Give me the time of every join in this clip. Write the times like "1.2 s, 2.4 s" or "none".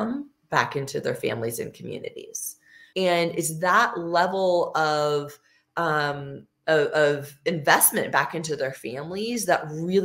2.8 s